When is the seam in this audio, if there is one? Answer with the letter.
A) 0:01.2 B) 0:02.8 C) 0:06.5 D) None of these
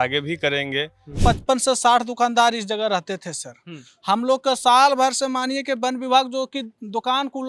A